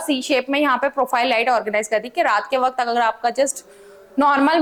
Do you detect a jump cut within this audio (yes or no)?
no